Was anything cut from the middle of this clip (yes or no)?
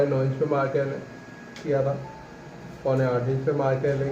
yes